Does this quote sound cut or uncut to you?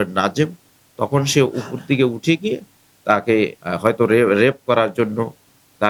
uncut